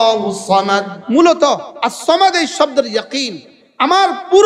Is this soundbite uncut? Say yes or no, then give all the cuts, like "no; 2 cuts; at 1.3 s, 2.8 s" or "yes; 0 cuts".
no; 1 cut; at 0.9 s